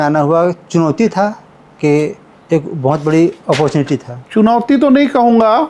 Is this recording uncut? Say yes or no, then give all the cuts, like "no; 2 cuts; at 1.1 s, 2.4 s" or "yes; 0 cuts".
no; 1 cut; at 4.2 s